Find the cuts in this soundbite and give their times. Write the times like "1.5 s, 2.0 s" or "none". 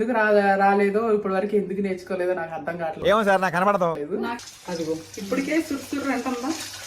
4.4 s